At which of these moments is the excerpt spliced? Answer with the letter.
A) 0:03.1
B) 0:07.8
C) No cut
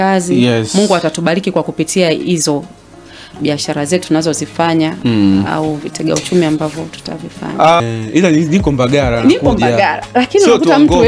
B